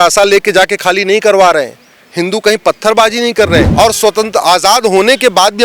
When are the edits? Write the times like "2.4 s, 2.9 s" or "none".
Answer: 3.7 s